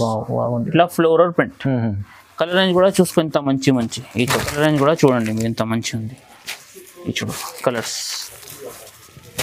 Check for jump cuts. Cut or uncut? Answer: cut